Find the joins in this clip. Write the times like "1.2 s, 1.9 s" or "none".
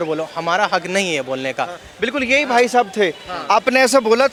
none